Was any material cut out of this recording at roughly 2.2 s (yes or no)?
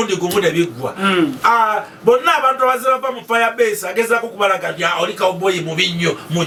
no